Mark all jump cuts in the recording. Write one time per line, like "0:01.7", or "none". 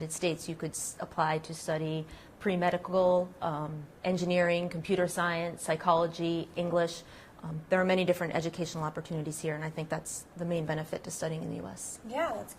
0:10.2